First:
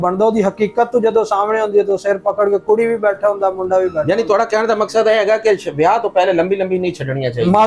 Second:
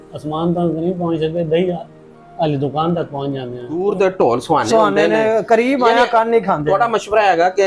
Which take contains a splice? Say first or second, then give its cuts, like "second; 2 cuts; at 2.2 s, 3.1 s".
second; 2 cuts; at 3.8 s, 5.3 s